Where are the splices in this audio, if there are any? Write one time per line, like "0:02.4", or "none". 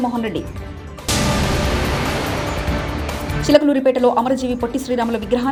none